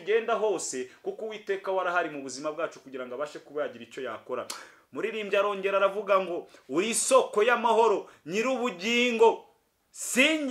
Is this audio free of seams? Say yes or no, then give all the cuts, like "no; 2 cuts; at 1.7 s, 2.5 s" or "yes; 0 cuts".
yes; 0 cuts